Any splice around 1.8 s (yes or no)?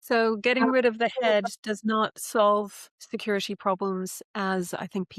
no